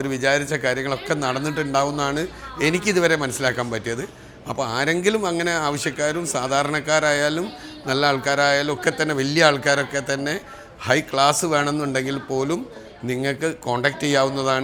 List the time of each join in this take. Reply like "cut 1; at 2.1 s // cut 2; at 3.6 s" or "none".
none